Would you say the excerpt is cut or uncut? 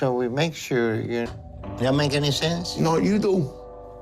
cut